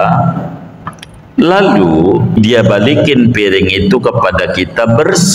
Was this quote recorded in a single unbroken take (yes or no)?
no